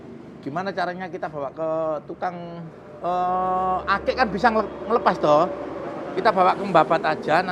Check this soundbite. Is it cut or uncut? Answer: uncut